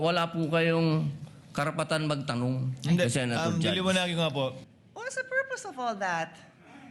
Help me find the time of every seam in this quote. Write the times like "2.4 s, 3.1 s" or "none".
4.6 s